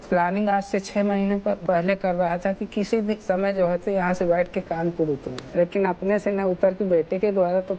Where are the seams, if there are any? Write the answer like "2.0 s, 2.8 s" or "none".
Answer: 1.6 s, 5.4 s